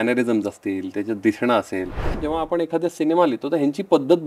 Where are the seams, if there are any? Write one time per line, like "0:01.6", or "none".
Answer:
0:02.2